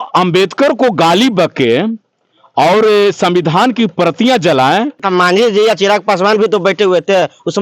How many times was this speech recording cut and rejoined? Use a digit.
1